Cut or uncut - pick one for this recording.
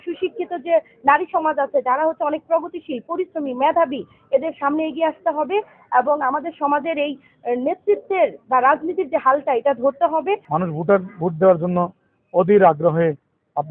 cut